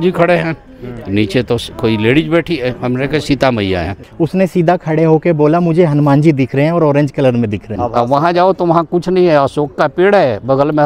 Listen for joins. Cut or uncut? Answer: cut